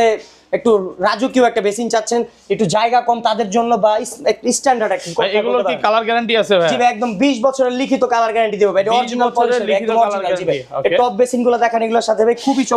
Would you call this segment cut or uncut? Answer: uncut